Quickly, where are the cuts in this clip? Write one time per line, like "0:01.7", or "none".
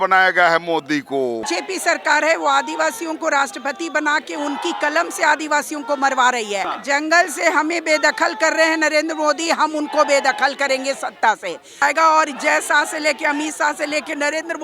0:01.4
0:06.7
0:11.8